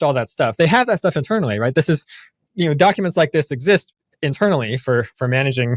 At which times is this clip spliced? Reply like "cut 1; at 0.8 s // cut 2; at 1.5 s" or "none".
none